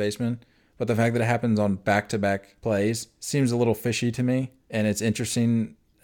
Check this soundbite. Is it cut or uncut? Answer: cut